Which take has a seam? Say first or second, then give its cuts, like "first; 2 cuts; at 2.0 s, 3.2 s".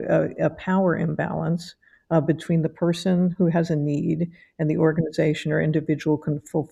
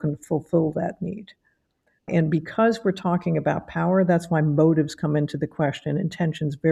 second; 1 cut; at 2.1 s